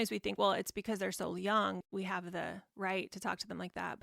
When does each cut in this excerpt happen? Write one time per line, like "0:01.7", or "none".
0:01.8